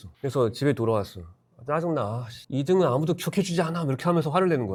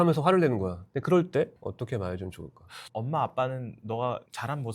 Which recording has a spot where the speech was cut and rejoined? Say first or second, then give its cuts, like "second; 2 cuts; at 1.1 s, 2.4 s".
second; 1 cut; at 2.8 s